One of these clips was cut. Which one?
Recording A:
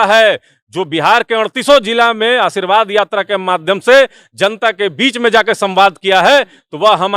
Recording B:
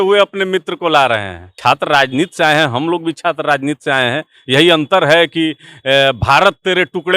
B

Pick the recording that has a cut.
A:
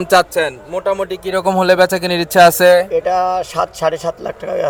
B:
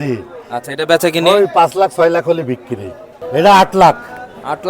B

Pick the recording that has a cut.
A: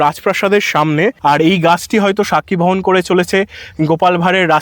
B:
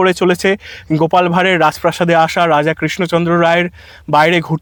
A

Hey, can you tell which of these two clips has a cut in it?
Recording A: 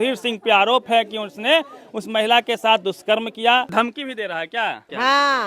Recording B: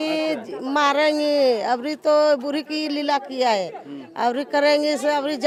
A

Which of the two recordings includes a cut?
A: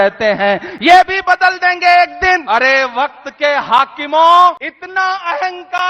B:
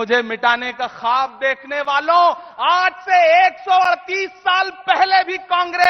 A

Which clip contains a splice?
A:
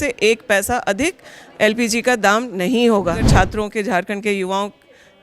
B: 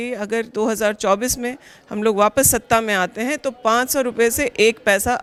A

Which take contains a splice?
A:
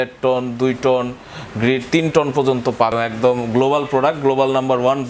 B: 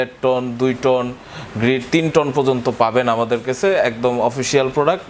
A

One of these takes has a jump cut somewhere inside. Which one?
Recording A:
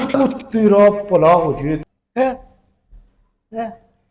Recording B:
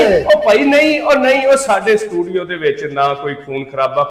A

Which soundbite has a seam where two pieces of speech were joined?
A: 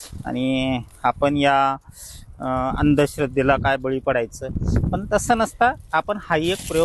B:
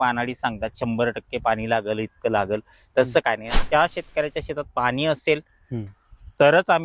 B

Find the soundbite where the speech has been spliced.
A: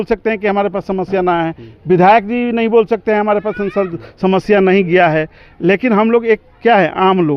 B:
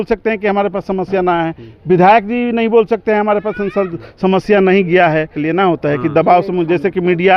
B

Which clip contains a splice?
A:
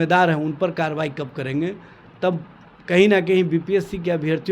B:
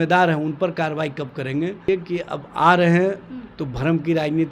B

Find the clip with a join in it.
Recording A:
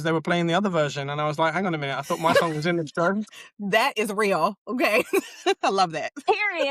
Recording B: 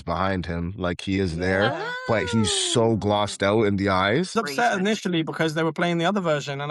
B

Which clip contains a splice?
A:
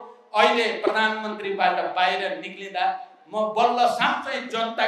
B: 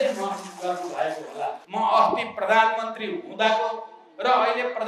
B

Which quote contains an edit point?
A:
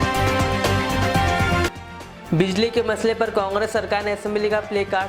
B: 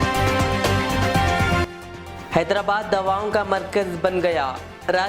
B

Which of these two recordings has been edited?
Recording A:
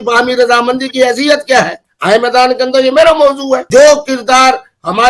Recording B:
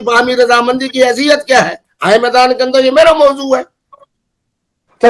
A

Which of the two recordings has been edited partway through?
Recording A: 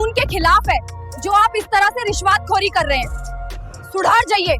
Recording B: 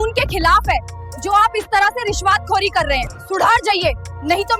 B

